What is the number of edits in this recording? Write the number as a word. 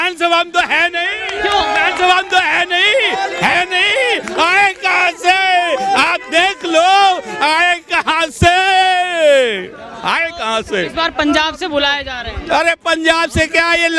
zero